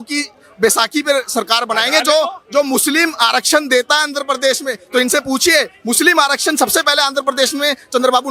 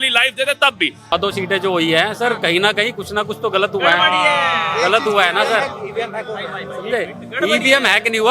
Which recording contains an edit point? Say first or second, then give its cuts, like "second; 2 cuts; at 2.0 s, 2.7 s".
second; 1 cut; at 1.1 s